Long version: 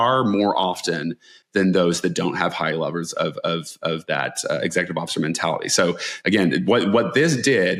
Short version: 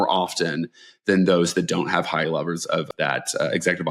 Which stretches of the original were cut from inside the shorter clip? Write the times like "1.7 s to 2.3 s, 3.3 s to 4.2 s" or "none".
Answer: 3.4 s to 4.0 s